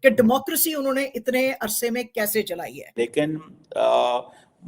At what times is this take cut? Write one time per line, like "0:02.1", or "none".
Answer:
0:02.8